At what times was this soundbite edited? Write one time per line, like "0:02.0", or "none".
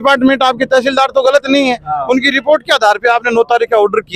none